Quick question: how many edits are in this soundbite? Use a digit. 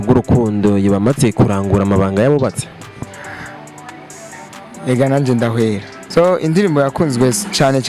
1